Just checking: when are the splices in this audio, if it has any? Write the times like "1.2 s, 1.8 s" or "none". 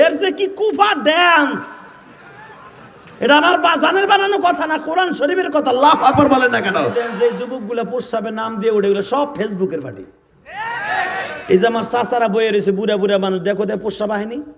6.8 s

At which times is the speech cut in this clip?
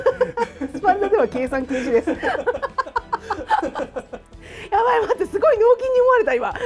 none

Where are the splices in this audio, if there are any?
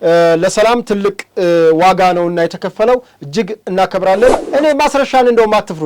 4.4 s

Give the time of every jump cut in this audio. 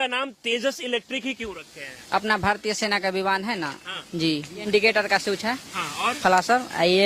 4.7 s

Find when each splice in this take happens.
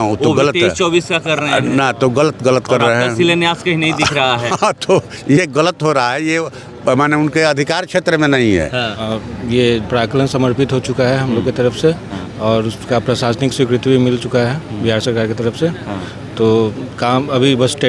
9.0 s

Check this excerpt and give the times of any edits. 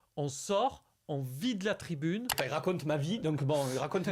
2.4 s

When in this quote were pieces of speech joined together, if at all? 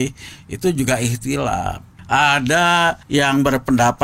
1.9 s, 3.0 s

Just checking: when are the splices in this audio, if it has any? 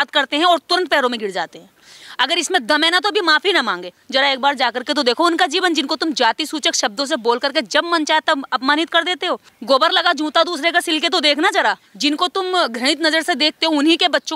4.0 s, 9.5 s, 11.9 s

